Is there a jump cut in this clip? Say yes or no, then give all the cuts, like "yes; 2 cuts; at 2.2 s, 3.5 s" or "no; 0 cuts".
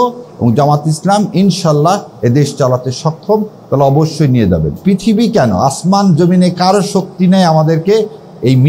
yes; 1 cut; at 4.8 s